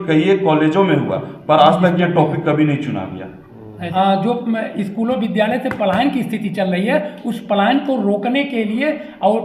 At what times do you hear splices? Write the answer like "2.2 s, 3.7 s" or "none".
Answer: 3.8 s

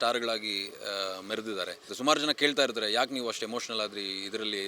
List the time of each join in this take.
1.9 s

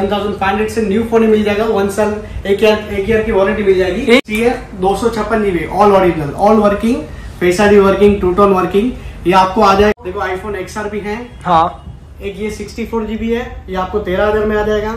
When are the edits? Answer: 4.2 s, 10.0 s

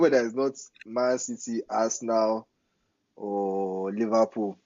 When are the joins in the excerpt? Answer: none

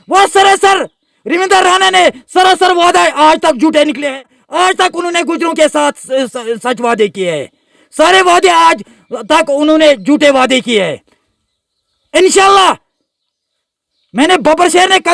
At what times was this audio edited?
4.4 s

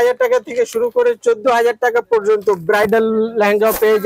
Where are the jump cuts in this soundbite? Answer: none

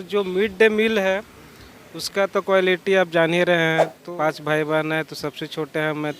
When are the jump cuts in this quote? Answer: 4.0 s

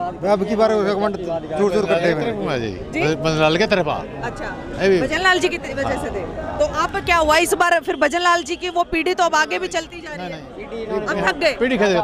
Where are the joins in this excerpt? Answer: none

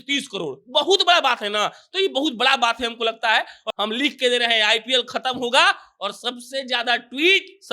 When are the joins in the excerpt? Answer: 3.6 s

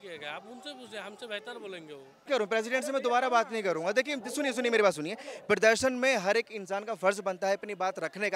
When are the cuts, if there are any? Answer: 2.1 s

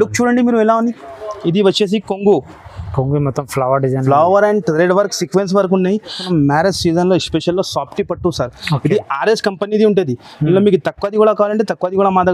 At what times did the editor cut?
6.2 s

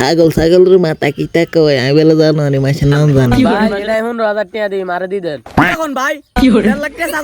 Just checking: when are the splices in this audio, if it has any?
3.8 s

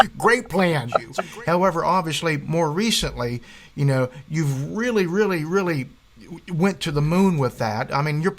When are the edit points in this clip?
1.1 s

